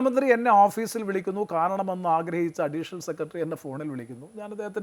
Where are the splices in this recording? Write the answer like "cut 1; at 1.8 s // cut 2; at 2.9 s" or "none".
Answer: none